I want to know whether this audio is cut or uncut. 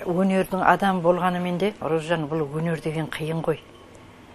cut